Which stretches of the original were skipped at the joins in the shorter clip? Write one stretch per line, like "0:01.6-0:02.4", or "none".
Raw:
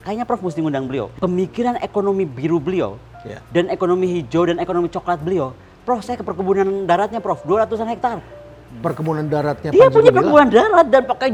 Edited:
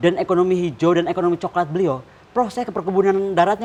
none